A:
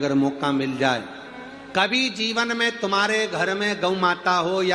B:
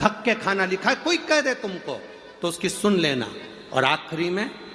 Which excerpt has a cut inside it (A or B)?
A